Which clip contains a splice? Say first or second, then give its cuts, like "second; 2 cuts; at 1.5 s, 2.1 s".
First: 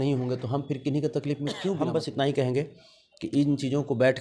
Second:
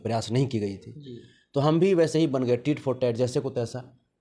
first; 1 cut; at 1.8 s